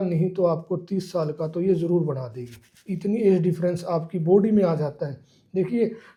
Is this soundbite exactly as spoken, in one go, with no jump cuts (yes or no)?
yes